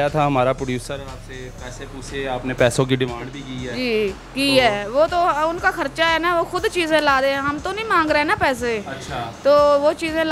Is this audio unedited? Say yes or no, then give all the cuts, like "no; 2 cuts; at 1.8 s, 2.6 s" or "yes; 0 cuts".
yes; 0 cuts